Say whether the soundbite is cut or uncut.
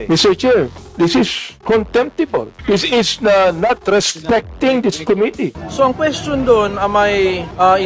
cut